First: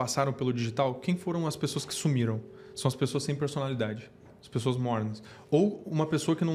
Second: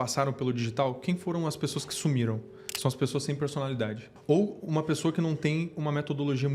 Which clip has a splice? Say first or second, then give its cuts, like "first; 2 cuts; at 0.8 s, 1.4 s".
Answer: second; 1 cut; at 4.1 s